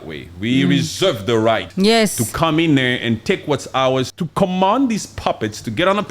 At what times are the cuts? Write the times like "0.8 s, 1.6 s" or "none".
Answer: 1.7 s, 4.1 s

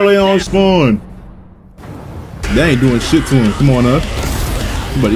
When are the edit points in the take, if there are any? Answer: 2.5 s

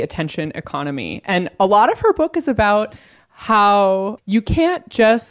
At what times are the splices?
4.2 s

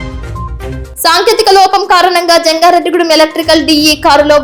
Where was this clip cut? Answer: none

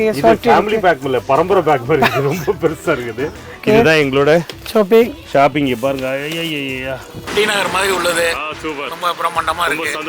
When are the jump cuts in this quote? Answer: 3.5 s, 7.4 s

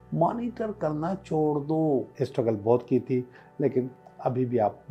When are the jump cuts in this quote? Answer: 2.2 s

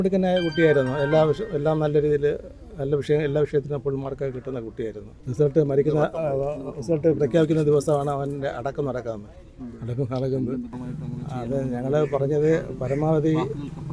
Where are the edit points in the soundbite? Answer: none

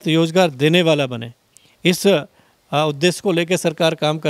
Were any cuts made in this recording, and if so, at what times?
none

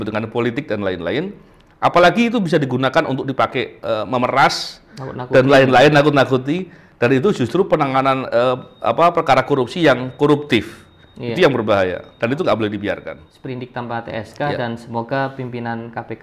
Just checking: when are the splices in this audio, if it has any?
13.3 s

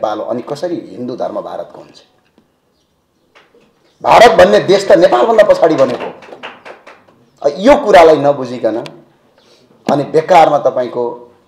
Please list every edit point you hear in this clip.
none

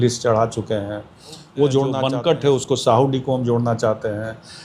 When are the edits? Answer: none

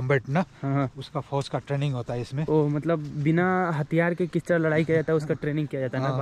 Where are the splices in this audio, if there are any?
none

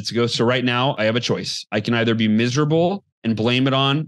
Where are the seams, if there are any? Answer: 1.0 s

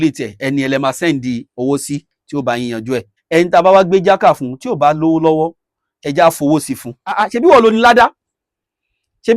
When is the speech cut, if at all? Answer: 3.1 s, 7.2 s

